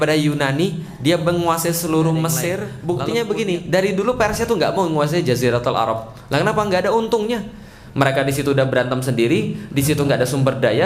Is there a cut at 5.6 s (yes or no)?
no